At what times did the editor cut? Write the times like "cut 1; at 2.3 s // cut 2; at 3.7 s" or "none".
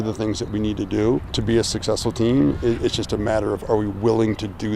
cut 1; at 1.3 s